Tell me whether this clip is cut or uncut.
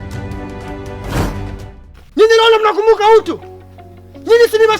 cut